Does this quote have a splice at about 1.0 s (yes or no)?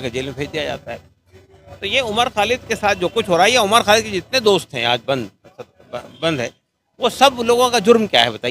no